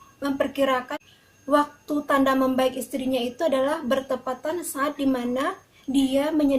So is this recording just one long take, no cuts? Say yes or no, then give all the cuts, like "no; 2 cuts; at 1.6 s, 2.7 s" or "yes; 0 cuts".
no; 1 cut; at 0.9 s